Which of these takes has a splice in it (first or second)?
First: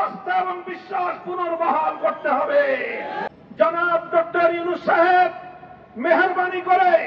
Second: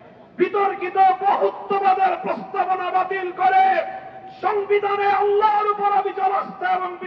first